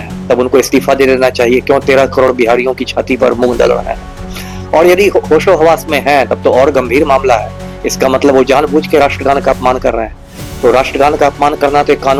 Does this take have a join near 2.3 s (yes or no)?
no